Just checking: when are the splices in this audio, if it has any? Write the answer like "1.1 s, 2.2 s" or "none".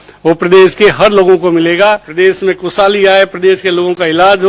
2.1 s